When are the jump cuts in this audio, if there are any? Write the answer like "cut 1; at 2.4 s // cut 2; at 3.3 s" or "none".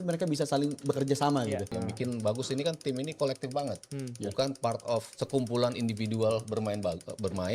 cut 1; at 1.7 s // cut 2; at 5.2 s